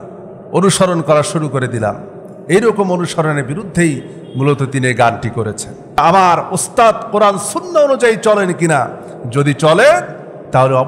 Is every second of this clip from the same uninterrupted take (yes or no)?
no